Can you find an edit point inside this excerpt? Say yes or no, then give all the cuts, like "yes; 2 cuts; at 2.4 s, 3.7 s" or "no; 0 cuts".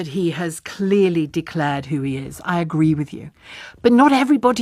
no; 0 cuts